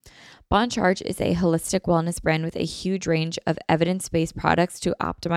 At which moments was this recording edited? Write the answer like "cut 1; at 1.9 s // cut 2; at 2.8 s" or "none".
none